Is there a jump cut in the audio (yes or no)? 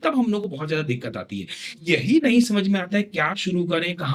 no